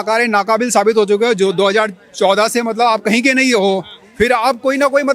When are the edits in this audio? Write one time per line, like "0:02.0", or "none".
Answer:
none